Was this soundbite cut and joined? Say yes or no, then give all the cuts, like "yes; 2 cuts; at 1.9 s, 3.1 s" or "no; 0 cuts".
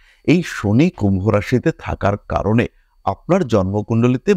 no; 0 cuts